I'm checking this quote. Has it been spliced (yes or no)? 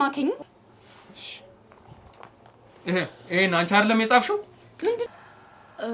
yes